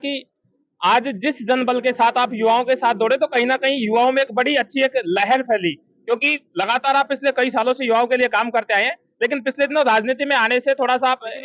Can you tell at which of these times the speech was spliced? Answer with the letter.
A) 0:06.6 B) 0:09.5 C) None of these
C